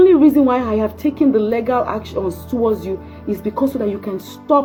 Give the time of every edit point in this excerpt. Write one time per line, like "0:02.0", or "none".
none